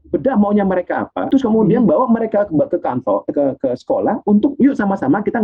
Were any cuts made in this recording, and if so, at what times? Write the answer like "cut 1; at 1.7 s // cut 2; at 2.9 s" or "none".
cut 1; at 1.2 s